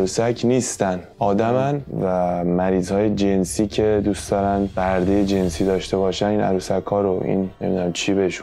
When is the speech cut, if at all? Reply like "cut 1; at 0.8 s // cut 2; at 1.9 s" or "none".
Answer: cut 1; at 1.9 s